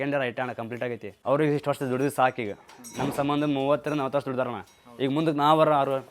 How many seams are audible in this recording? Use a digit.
1